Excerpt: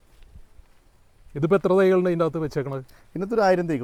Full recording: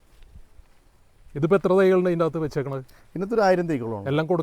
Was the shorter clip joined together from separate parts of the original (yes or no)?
no